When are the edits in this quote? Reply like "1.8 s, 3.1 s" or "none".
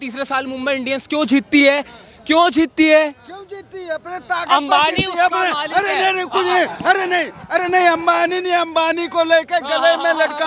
none